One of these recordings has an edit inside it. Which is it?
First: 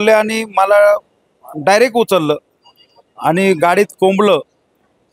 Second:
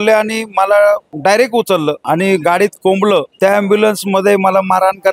second; 3 cuts; at 1.1 s, 2.0 s, 3.3 s

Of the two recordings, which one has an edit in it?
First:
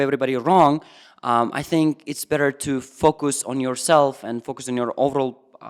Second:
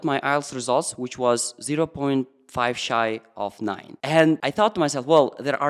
second; 2 cuts; at 3.9 s, 4.5 s

